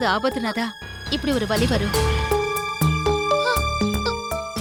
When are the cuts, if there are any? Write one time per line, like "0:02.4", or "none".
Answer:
none